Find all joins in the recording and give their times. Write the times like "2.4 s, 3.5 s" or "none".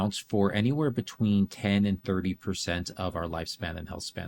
none

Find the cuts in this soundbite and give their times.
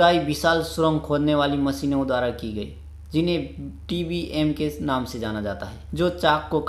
5.7 s

